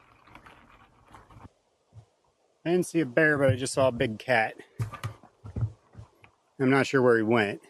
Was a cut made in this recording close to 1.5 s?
yes; 1 cut; at 1.5 s

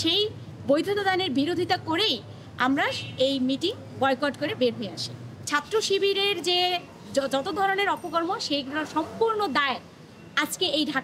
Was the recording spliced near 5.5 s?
yes; 1 cut; at 5.5 s

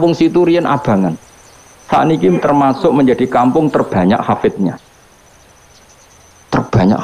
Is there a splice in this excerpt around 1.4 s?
no; 0 cuts

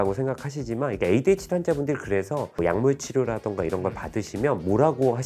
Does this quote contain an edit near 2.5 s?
no; 0 cuts

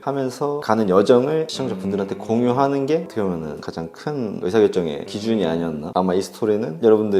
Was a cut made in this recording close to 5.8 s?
yes; 2 cuts; at 3.1 s, 5.8 s

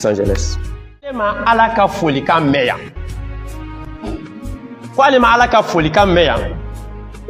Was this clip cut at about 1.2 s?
yes; 1 cut; at 1.2 s

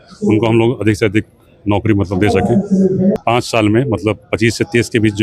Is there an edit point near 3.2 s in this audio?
yes; 1 cut; at 3.2 s

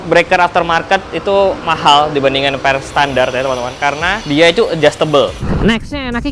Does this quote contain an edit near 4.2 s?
yes; 3 cuts; at 1.6 s, 4.2 s, 5.4 s

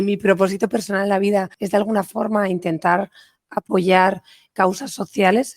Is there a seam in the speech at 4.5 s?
yes; 2 cuts; at 1.6 s, 4.5 s

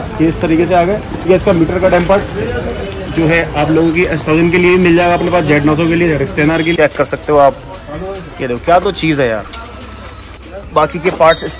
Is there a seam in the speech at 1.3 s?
yes; 3 cuts; at 1.3 s, 6.8 s, 10.3 s

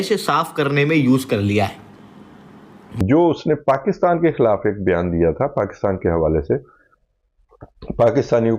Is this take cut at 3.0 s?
yes; 1 cut; at 3.0 s

